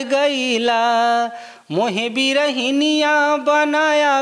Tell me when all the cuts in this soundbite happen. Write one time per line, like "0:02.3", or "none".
none